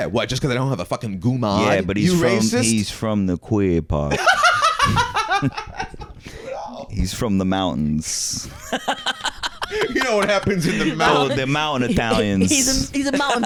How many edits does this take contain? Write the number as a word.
zero